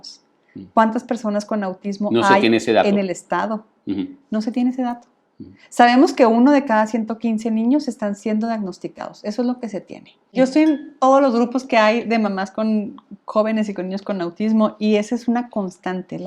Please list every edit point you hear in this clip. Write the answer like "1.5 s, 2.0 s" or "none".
10.3 s